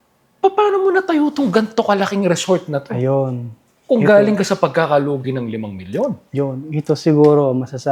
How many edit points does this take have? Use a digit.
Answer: 0